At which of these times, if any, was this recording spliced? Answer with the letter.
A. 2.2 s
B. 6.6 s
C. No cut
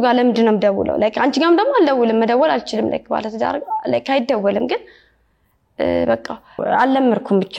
B